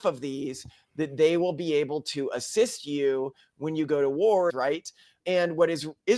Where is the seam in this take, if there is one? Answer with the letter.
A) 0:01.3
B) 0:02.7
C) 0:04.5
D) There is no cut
C